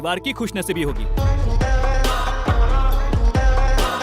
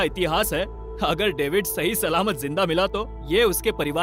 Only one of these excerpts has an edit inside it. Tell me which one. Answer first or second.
first